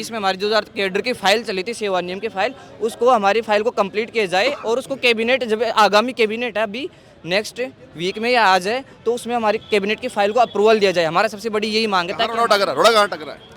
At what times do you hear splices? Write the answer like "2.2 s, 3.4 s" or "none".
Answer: none